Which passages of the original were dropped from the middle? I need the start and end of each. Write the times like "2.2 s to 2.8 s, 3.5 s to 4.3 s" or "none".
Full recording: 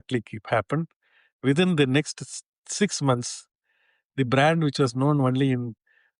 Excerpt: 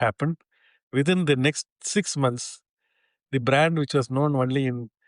2.2 s to 2.6 s